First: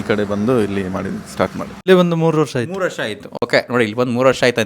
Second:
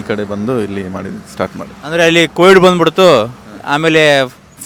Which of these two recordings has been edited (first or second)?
first